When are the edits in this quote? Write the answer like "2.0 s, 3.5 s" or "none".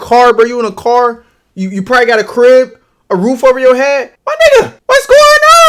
4.2 s, 4.8 s